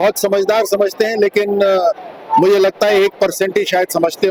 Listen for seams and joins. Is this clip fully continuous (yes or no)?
yes